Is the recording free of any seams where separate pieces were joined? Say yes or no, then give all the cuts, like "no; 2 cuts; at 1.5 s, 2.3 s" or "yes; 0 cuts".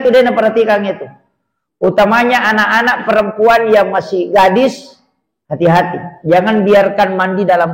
yes; 0 cuts